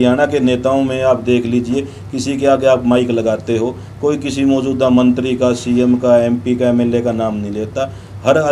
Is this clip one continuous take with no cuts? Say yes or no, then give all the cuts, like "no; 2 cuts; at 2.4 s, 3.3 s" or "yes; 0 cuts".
yes; 0 cuts